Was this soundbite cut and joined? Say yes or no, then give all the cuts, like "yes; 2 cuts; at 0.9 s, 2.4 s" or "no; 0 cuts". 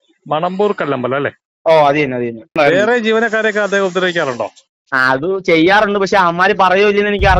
yes; 1 cut; at 2.5 s